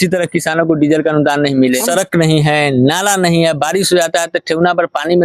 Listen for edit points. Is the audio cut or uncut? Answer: cut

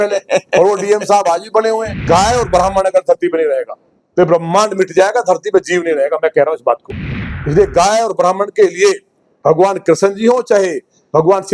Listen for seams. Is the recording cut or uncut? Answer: cut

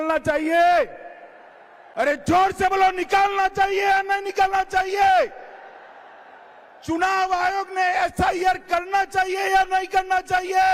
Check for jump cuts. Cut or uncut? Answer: uncut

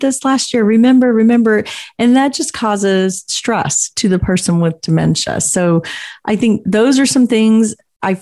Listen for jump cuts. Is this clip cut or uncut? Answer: uncut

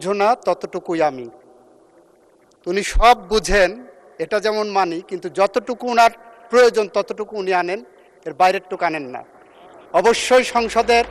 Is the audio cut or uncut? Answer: uncut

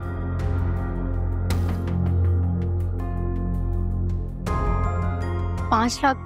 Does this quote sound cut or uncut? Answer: uncut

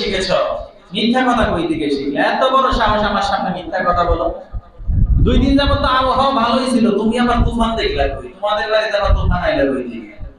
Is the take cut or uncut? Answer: uncut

